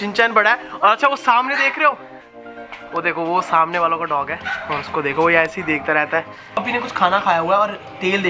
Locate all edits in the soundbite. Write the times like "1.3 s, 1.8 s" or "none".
6.6 s